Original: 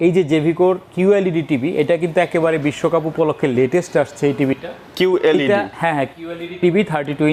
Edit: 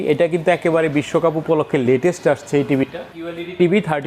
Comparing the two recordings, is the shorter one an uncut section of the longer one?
no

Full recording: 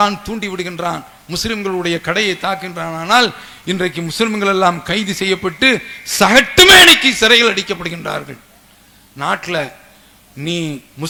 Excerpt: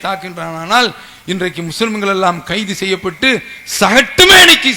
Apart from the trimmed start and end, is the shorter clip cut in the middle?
no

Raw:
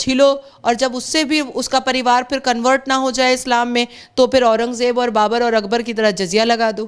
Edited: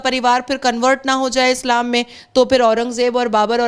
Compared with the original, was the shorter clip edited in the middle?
no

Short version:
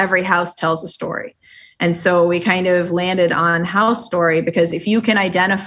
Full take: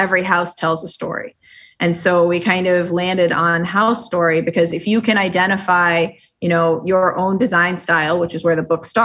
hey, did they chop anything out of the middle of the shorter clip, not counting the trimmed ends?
no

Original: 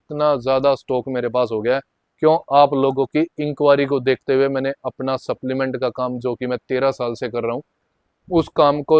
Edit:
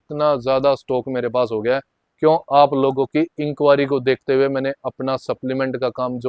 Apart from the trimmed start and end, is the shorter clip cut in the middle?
no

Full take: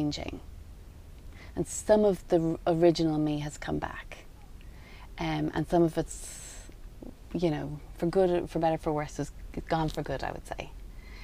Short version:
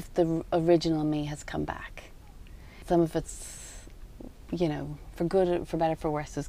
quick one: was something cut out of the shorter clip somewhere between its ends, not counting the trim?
yes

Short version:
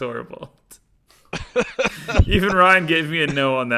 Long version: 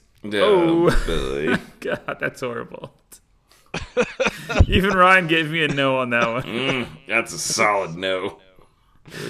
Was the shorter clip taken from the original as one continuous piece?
yes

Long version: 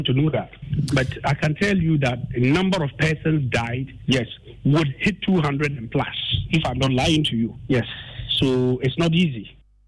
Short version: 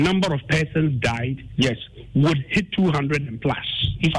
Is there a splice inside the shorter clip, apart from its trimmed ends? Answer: no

